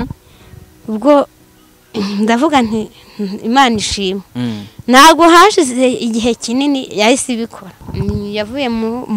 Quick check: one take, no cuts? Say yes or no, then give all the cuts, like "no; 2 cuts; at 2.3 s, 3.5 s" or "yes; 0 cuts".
no; 1 cut; at 7.9 s